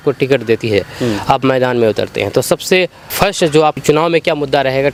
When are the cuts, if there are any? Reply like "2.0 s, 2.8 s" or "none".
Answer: none